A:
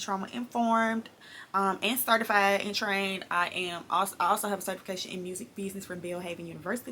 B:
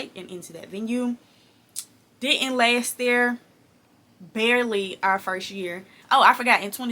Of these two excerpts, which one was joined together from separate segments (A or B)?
B